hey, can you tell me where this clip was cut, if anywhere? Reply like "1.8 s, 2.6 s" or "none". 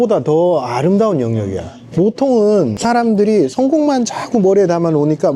2.8 s